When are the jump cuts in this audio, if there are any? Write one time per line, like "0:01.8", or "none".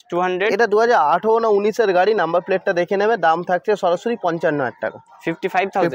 none